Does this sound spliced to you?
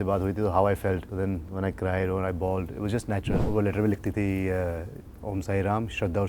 yes; 2 cuts; at 1.1 s, 3.3 s

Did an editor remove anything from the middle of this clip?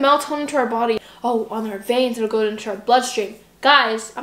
yes; 1 cut; at 1.1 s

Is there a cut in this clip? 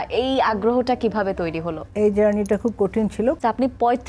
yes; 2 cuts; at 1.8 s, 3.4 s

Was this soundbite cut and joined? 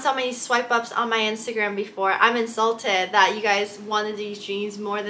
no; 0 cuts

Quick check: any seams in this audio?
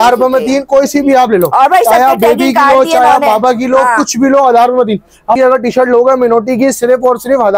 yes; 1 cut; at 5.4 s

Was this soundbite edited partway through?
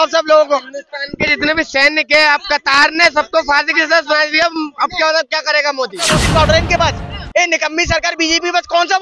yes; 1 cut; at 6.2 s

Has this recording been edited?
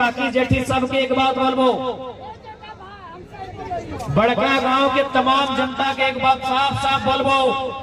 no; 0 cuts

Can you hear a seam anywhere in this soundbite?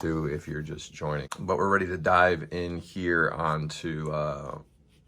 yes; 1 cut; at 1.3 s

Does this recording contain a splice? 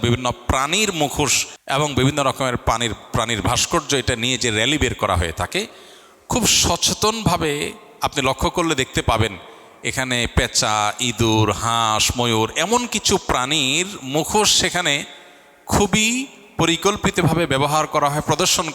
yes; 1 cut; at 1.5 s

